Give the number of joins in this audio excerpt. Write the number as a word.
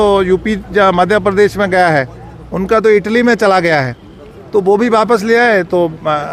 zero